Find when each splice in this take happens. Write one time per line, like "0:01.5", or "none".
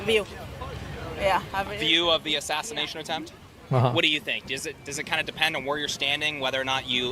0:01.5